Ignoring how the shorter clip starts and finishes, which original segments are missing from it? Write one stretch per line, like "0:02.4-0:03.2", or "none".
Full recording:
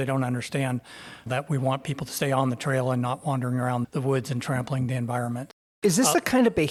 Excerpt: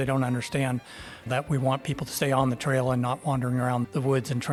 none